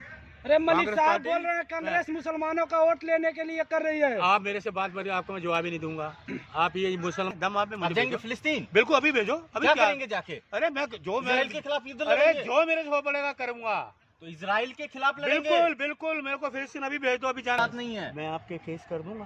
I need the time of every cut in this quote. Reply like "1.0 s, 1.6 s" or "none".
7.3 s, 17.6 s

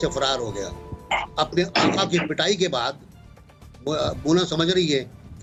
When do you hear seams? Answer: none

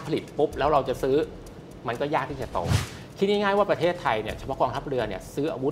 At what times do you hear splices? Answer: 2.8 s

